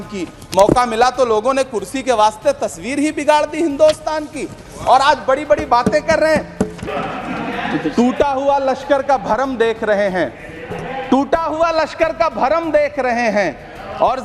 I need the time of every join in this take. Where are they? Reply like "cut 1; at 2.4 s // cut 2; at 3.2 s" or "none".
cut 1; at 6.6 s